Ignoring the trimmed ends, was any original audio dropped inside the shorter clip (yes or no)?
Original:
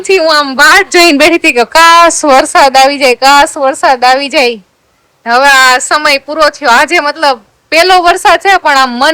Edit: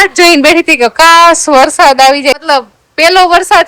yes